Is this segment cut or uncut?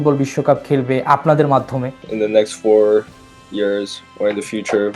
cut